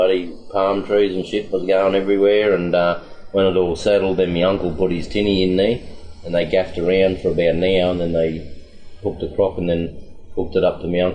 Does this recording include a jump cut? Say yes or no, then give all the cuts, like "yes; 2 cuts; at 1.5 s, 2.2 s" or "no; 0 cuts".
no; 0 cuts